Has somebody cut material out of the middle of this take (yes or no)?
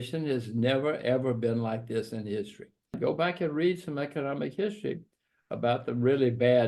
yes